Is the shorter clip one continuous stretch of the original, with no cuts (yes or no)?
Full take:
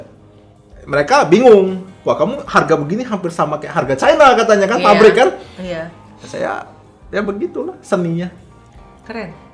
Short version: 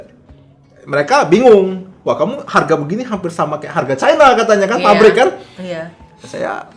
yes